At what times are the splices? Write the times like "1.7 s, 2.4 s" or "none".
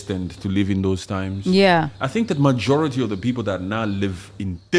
none